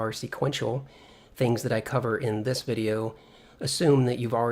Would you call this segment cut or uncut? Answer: uncut